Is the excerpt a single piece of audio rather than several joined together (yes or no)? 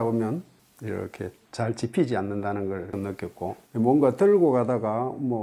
yes